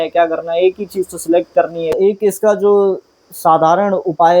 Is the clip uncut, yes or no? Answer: no